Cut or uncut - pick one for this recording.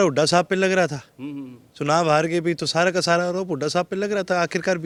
uncut